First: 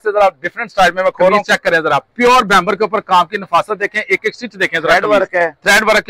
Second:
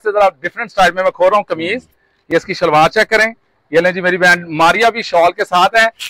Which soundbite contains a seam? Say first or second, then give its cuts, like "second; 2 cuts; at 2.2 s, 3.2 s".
first; 1 cut; at 1.4 s